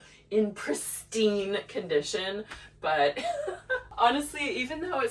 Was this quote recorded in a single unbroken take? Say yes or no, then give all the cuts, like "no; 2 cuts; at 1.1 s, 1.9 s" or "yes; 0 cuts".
no; 1 cut; at 3.9 s